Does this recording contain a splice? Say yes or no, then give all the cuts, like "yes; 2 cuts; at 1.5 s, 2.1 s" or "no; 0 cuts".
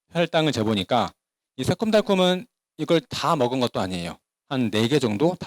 no; 0 cuts